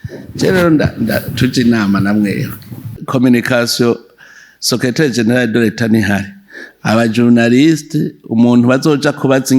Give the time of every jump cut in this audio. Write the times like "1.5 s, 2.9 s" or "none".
3.0 s